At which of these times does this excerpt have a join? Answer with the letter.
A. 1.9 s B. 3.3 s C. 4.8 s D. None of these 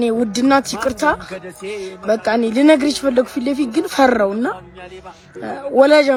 D